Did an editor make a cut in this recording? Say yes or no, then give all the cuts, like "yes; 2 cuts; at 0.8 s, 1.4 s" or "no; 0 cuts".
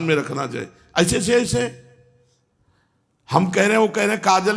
no; 0 cuts